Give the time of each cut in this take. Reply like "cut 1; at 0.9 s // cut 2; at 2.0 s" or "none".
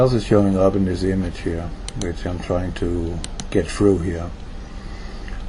cut 1; at 3.5 s